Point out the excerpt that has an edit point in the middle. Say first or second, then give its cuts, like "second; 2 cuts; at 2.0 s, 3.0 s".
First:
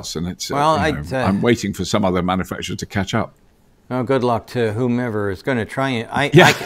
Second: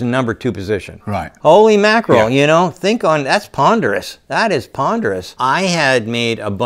second; 2 cuts; at 1.2 s, 5.3 s